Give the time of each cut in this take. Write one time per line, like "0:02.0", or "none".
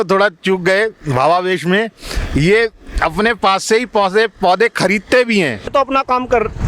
0:05.7